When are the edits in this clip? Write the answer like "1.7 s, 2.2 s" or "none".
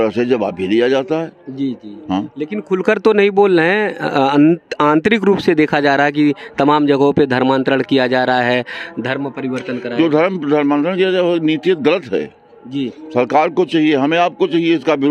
none